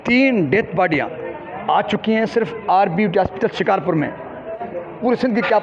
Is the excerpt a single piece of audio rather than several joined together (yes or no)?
no